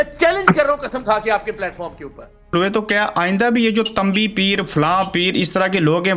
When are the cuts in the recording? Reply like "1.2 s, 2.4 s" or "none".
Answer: 2.5 s

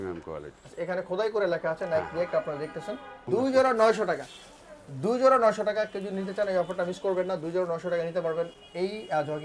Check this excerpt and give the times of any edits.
3.2 s

